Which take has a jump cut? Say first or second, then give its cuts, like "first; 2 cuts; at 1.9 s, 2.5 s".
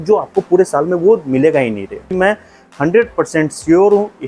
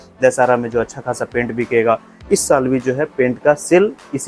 first; 1 cut; at 2.1 s